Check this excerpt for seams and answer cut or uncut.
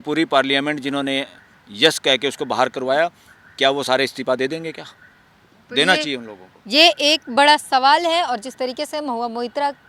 uncut